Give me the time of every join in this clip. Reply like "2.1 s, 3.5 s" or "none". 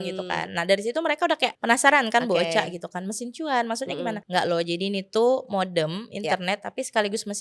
1.6 s, 4.2 s